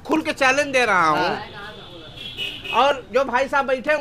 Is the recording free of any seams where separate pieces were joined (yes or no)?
yes